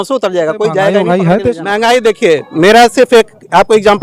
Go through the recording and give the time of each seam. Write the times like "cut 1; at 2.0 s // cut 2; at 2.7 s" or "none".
cut 1; at 1.0 s